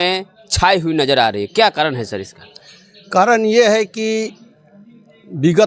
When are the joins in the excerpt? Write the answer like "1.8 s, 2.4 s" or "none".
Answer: none